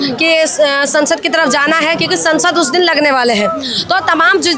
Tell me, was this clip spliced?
no; 0 cuts

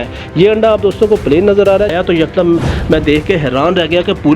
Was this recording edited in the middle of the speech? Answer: yes; 1 cut; at 1.9 s

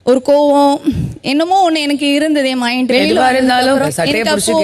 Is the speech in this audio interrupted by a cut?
yes; 2 cuts; at 2.9 s, 3.9 s

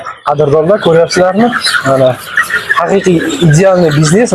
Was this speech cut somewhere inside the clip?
no; 0 cuts

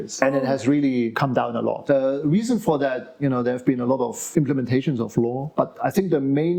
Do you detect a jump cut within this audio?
no; 0 cuts

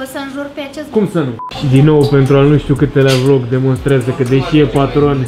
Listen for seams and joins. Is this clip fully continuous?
no; 1 cut; at 1.4 s

